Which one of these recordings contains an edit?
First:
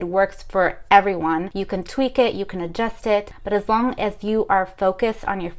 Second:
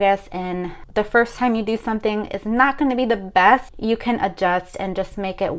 first; 2 cuts; at 1.5 s, 3.4 s

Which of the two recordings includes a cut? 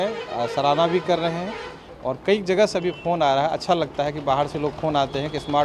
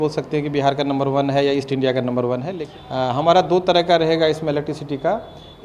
second; 1 cut; at 2.6 s

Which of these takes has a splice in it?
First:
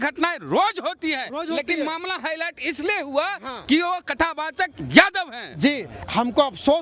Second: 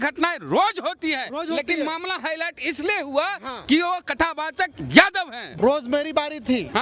second; 1 cut; at 5.5 s

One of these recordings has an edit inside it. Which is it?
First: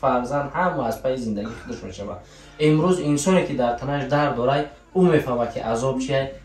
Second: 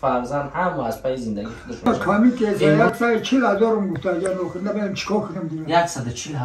second; 1 cut; at 1.9 s

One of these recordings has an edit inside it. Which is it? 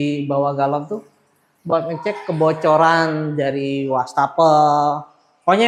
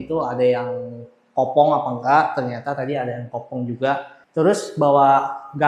second; 1 cut; at 4.2 s

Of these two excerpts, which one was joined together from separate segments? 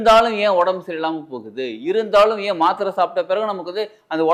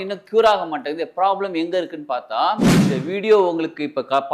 second; 1 cut; at 2.7 s

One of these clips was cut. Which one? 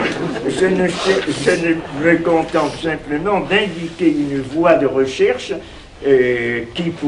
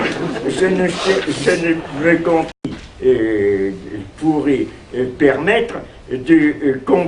first; 1 cut; at 2.5 s

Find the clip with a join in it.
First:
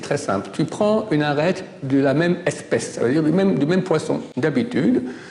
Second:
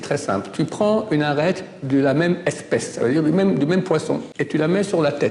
second; 1 cut; at 4.3 s

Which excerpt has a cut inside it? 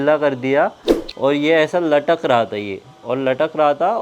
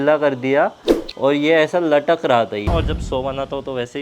second; 1 cut; at 2.7 s

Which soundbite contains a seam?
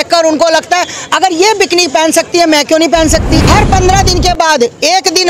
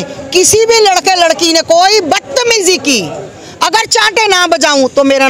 first; 1 cut; at 3.4 s

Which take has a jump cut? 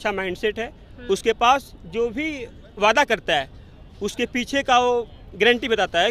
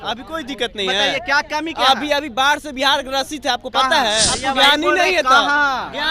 second; 1 cut; at 4.3 s

